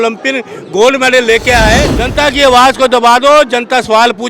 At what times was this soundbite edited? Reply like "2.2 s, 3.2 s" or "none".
2.0 s

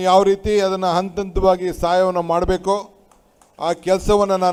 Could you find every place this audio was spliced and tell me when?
none

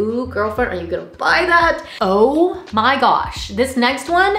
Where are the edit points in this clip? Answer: 1.8 s

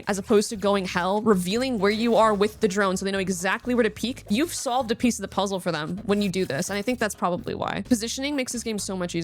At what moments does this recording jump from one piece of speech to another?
7.8 s

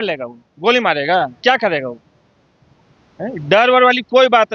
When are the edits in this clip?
none

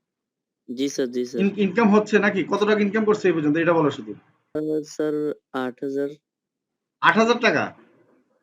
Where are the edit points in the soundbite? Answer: 4.6 s

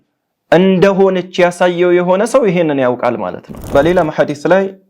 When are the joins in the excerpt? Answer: 3.5 s

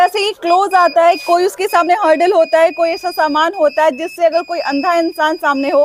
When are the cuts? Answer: none

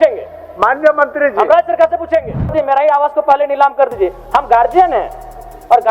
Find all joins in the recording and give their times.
2.5 s

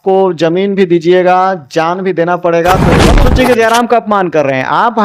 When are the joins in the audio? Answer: 3.1 s

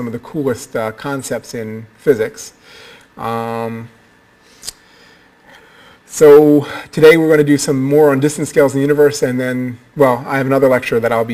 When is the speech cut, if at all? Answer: 4.6 s

